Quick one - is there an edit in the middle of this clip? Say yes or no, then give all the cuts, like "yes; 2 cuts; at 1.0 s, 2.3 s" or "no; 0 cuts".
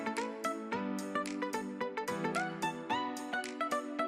no; 0 cuts